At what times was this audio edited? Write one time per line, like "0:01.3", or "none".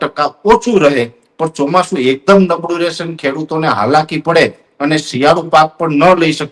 none